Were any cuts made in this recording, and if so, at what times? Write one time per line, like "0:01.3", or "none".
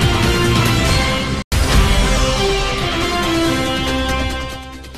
0:01.4